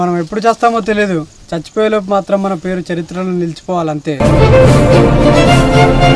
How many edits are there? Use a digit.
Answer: 1